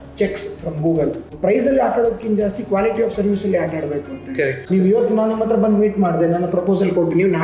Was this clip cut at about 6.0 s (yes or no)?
no